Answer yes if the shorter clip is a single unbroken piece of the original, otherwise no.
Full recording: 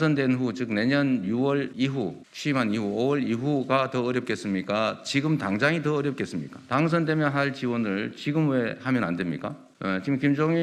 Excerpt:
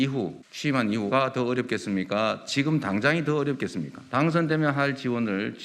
no